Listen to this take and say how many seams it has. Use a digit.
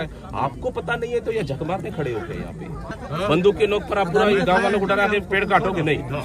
1